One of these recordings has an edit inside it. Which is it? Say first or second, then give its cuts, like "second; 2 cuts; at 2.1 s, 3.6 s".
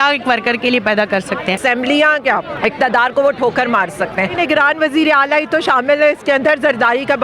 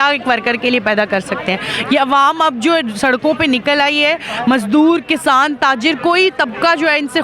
first; 3 cuts; at 1.6 s, 2.5 s, 4.3 s